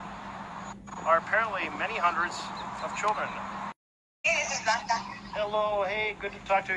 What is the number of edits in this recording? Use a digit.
1